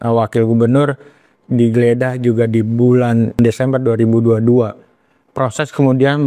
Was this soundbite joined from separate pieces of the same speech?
yes; 1 cut; at 3.4 s

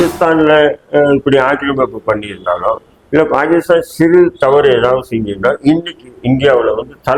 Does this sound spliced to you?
no; 0 cuts

